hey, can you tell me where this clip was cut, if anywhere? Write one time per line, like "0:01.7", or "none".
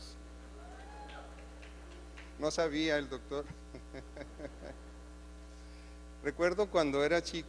none